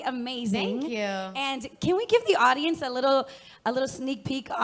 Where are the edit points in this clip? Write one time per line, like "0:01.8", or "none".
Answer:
none